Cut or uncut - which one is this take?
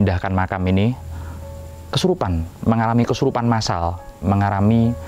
uncut